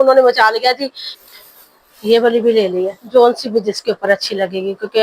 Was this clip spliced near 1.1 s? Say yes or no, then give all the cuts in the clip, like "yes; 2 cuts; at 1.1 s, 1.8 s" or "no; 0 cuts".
yes; 1 cut; at 1.1 s